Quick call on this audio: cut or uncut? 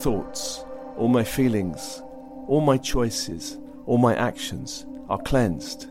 uncut